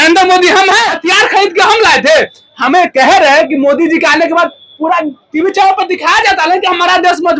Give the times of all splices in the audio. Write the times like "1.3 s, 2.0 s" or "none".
1.0 s